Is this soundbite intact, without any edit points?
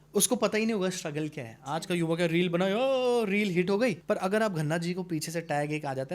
no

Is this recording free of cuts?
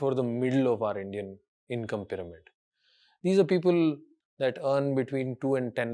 no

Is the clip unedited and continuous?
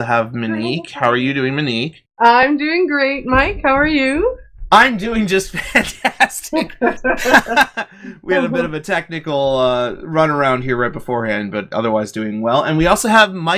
yes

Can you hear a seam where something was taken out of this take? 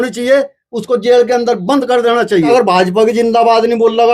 yes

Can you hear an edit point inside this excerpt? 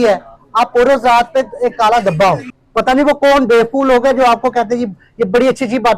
yes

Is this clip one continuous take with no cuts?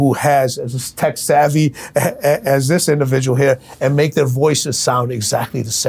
yes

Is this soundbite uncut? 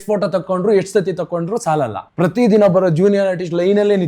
no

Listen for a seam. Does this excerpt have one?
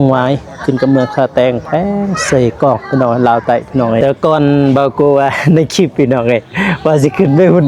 yes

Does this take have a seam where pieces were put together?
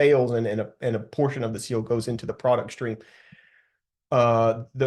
no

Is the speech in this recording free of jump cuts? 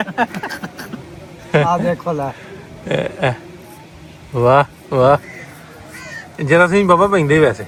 yes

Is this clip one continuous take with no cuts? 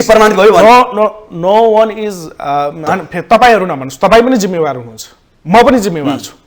no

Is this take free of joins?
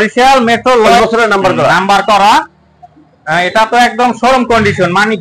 no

